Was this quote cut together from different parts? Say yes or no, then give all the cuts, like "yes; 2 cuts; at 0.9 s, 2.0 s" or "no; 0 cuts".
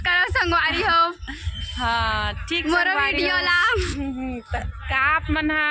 no; 0 cuts